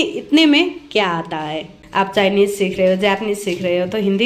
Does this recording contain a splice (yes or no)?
yes